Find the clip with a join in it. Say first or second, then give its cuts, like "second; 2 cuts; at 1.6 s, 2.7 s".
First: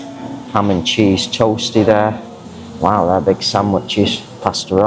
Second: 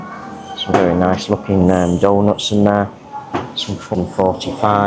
second; 1 cut; at 3.9 s